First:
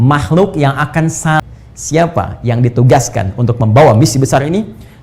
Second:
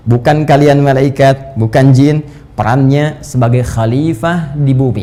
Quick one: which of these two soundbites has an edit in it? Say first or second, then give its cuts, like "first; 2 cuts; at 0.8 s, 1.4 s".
first; 1 cut; at 1.4 s